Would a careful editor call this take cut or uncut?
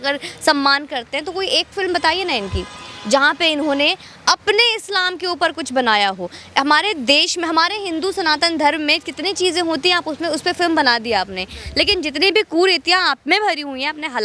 uncut